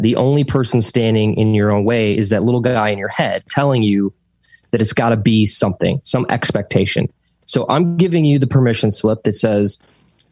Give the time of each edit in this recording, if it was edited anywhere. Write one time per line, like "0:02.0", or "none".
none